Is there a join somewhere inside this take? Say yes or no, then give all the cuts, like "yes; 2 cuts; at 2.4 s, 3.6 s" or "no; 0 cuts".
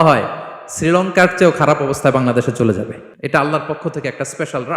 yes; 1 cut; at 3.1 s